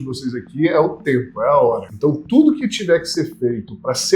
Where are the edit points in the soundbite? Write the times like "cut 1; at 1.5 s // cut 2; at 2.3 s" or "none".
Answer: cut 1; at 1.9 s